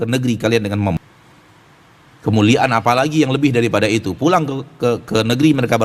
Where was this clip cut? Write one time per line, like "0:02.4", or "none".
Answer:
0:01.0